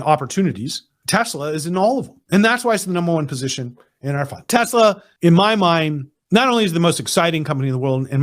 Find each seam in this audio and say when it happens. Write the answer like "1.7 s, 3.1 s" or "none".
4.4 s